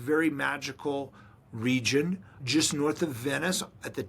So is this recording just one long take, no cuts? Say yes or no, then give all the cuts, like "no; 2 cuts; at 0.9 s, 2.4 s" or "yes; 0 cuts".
no; 1 cut; at 2.3 s